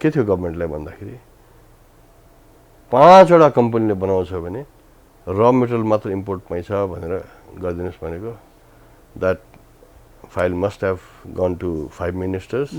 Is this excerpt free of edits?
yes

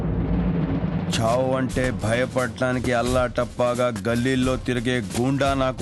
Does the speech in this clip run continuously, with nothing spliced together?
yes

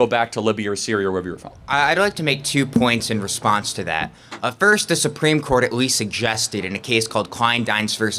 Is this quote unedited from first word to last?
yes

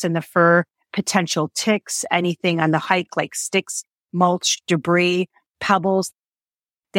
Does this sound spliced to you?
no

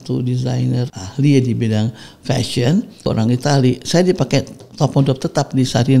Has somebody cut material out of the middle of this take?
yes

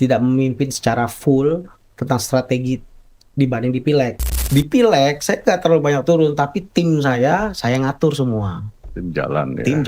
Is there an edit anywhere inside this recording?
yes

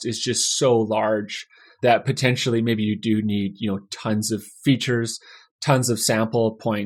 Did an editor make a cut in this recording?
no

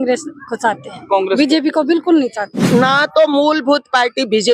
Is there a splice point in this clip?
yes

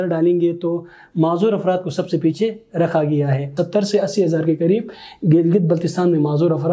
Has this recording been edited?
yes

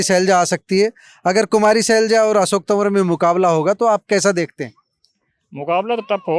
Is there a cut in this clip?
no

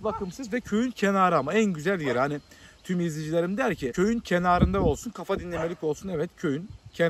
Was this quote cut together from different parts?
yes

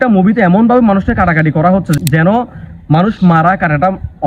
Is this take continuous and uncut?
no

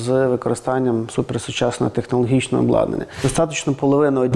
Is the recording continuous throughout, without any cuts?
no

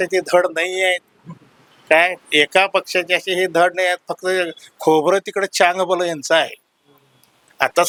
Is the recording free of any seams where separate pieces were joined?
yes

